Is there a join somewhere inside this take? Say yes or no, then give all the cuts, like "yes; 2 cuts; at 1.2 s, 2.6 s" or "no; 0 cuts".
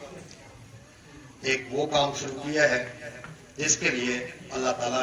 no; 0 cuts